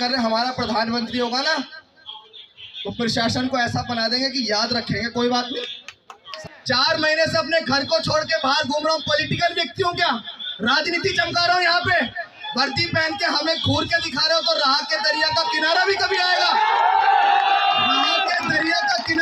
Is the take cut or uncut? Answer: cut